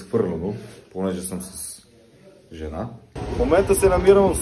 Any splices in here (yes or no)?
yes